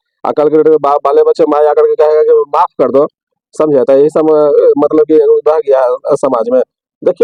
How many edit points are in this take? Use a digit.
0